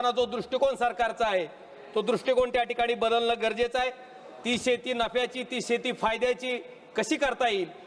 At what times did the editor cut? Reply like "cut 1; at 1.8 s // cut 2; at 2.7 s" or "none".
none